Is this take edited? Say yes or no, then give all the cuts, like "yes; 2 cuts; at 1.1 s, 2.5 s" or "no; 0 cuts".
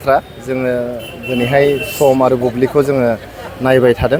no; 0 cuts